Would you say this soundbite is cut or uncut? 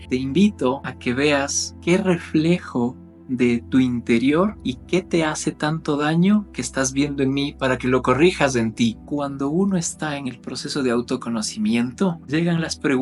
cut